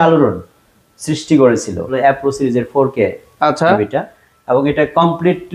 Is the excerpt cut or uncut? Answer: cut